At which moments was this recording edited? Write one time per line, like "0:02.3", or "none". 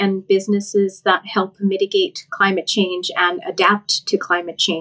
none